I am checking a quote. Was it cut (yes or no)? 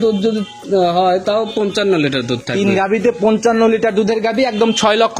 no